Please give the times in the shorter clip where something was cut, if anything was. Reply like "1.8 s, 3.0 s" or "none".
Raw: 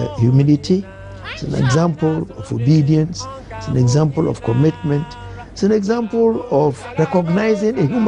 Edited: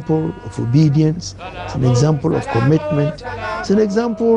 none